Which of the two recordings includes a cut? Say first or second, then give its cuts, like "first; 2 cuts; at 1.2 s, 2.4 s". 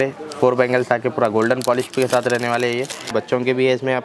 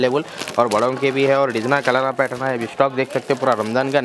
first; 1 cut; at 3.1 s